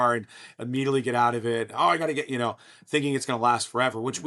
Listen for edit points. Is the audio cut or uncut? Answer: uncut